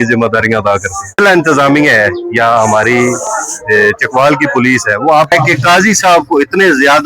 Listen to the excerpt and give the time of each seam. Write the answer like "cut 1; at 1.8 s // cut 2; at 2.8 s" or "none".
cut 1; at 1.2 s // cut 2; at 5.3 s